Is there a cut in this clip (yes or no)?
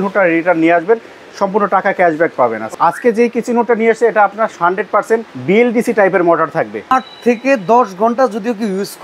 yes